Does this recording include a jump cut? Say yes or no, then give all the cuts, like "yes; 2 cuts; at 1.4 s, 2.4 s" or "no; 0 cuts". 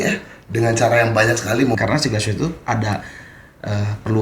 yes; 1 cut; at 1.8 s